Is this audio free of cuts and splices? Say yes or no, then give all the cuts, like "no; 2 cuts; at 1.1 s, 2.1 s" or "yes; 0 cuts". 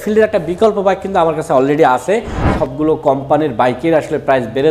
no; 1 cut; at 2.5 s